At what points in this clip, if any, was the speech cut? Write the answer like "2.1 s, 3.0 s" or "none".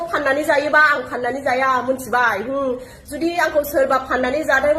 none